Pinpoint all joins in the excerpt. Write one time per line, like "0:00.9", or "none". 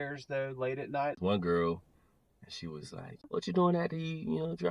0:01.2
0:03.2